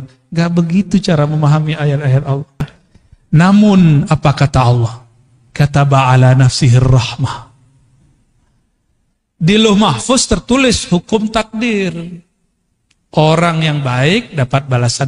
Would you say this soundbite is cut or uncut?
cut